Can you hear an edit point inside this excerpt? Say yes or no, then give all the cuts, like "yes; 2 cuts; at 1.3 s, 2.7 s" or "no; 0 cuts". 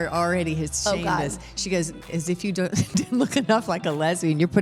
yes; 1 cut; at 2.1 s